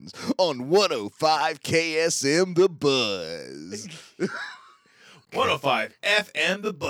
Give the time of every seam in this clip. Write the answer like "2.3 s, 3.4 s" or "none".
none